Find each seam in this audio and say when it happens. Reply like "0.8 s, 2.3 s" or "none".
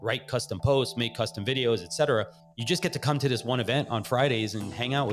none

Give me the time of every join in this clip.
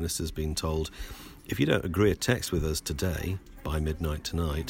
none

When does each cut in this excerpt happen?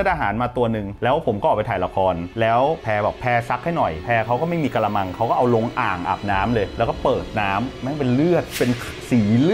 none

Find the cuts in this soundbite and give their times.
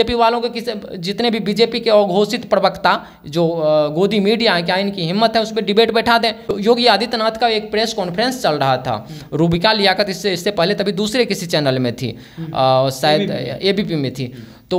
6.5 s

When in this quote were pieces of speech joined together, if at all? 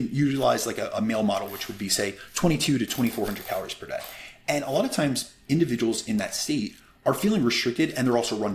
none

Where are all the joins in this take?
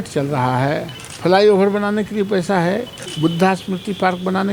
1.0 s, 3.0 s

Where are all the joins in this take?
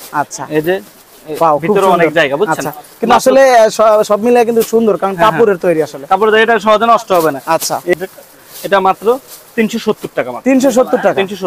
7.9 s

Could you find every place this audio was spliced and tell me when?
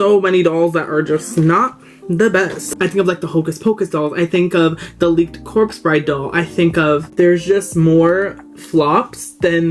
2.7 s, 7.1 s

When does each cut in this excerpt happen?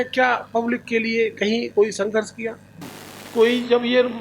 none

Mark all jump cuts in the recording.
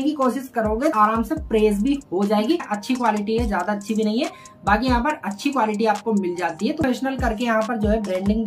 0.9 s, 2.7 s, 6.8 s

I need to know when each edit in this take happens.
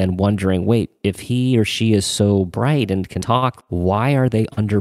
3.6 s

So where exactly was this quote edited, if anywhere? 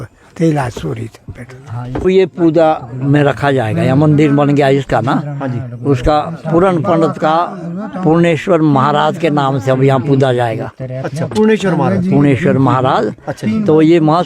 2.0 s

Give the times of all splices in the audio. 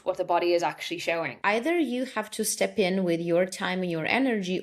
1.4 s

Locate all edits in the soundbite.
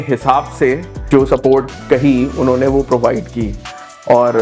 1.0 s

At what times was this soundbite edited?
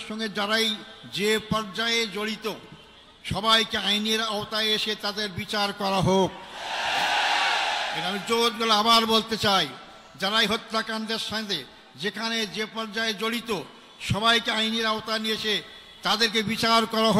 none

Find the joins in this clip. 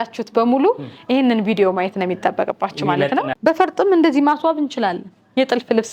3.3 s

